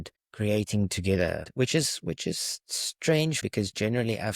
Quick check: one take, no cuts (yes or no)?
no